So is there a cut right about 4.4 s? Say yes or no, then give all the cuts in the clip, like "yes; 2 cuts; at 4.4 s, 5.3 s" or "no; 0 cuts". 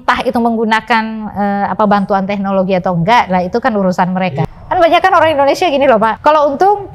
yes; 2 cuts; at 4.4 s, 6.2 s